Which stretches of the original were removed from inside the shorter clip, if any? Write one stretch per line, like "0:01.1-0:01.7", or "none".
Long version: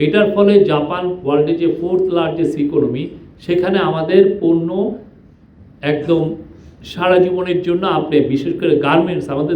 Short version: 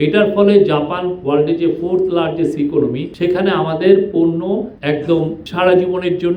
0:03.1-0:03.3
0:05.0-0:05.7
0:06.4-0:06.9